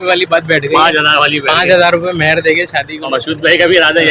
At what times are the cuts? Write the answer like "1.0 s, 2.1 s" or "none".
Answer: 2.9 s